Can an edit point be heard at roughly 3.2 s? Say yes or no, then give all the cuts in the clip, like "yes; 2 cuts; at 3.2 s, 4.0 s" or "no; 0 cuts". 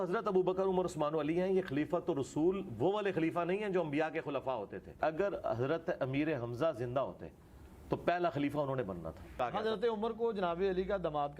no; 2 cuts; at 5.0 s, 9.4 s